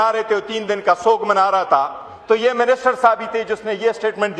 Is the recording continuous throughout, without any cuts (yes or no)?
yes